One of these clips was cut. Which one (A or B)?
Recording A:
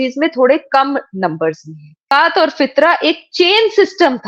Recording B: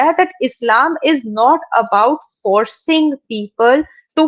A